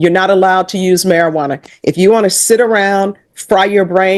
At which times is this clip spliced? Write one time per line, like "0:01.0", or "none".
none

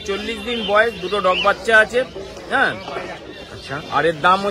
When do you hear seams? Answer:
none

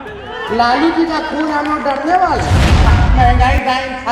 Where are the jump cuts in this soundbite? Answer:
0:02.9

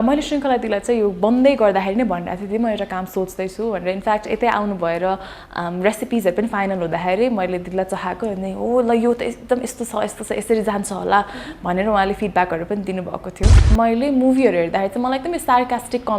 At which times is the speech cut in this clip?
0:13.6

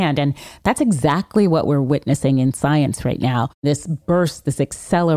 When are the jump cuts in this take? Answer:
0:03.6

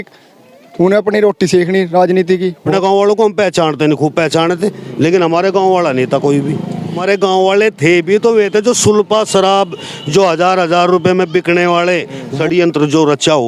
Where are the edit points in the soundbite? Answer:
0:02.7
0:07.0
0:12.3

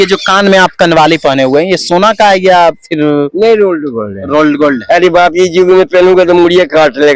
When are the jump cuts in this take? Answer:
none

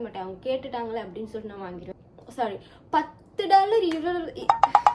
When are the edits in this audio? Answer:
0:01.8

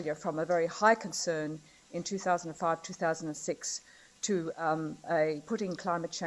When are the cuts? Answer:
0:02.7

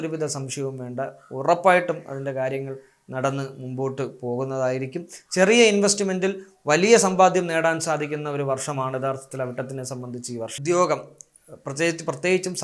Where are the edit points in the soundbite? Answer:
0:10.6

